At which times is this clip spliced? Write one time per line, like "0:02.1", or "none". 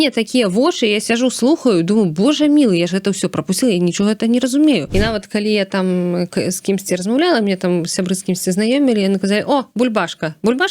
0:04.9